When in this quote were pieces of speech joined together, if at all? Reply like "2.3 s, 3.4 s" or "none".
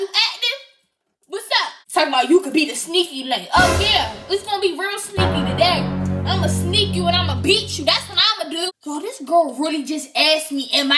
1.8 s, 8.7 s